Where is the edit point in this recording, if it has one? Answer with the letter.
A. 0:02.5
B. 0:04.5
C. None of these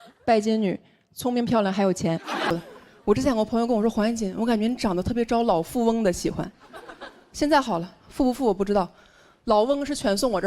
A